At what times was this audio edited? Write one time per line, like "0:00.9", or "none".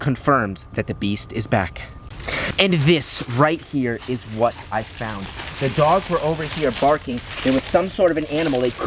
none